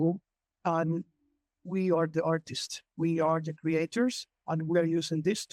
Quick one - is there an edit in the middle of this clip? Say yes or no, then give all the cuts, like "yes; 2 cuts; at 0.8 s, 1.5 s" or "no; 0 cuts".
no; 0 cuts